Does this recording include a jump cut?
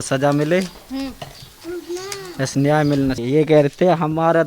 yes; 1 cut; at 3.2 s

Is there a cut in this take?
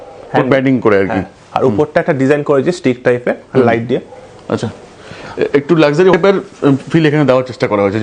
no; 0 cuts

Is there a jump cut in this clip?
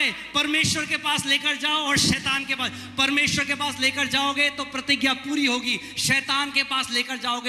no; 0 cuts

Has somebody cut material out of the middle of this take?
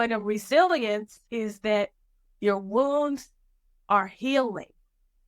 yes; 1 cut; at 1.2 s

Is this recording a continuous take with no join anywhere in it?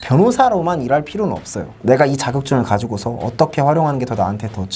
yes; 0 cuts

